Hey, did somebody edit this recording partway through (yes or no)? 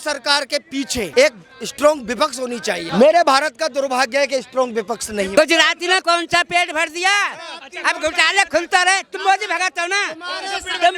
yes